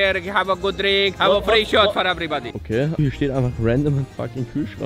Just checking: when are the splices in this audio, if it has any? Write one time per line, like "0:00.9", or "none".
0:01.2
0:03.0